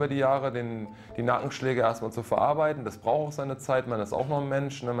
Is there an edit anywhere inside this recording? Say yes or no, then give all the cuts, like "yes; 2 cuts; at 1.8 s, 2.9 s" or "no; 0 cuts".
no; 0 cuts